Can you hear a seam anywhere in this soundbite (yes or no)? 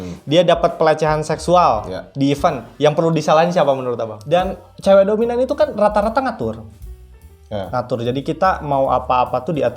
yes